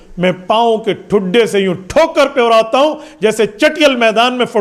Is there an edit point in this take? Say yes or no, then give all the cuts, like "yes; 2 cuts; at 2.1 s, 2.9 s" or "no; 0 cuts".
no; 0 cuts